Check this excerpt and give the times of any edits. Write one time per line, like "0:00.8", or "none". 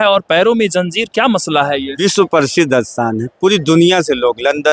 0:01.9